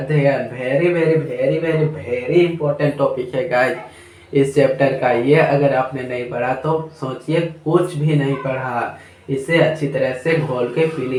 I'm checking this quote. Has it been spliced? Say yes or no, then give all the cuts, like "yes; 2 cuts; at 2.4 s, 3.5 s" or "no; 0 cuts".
no; 0 cuts